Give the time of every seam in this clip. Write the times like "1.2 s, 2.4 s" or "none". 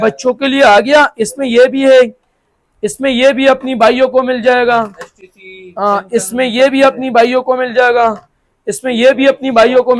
none